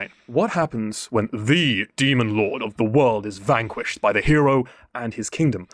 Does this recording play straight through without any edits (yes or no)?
yes